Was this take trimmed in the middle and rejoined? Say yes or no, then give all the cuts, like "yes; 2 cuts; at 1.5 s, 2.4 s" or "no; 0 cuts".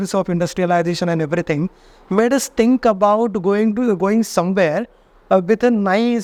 no; 0 cuts